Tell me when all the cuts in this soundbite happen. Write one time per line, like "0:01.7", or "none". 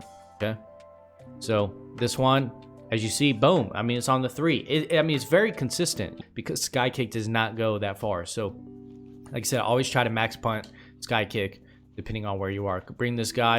0:06.2